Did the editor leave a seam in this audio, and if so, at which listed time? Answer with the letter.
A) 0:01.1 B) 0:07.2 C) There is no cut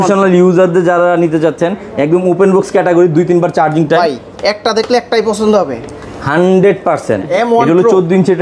B